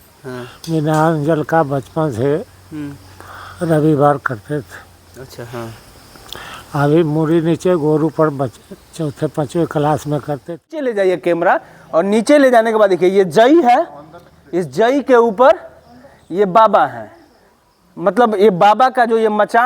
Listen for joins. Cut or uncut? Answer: cut